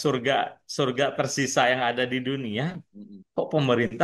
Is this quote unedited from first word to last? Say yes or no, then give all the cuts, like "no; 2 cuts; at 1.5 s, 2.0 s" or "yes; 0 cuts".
yes; 0 cuts